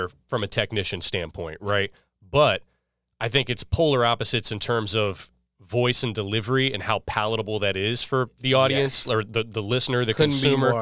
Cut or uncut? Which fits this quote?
uncut